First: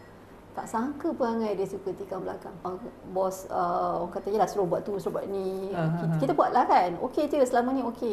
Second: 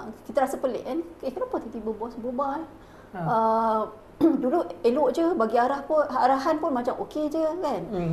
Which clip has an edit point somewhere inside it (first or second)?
first